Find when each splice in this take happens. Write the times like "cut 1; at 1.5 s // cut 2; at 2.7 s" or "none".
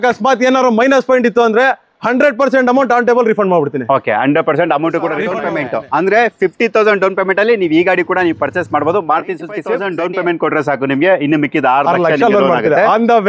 cut 1; at 5.4 s // cut 2; at 9.7 s